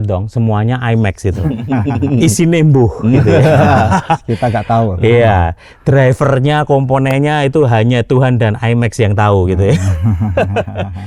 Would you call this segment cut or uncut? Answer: uncut